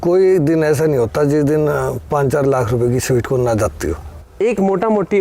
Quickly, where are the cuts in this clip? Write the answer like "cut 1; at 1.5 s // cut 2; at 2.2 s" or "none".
cut 1; at 4.2 s